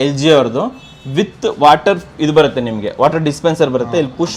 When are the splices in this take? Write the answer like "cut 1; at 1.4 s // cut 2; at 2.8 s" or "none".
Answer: none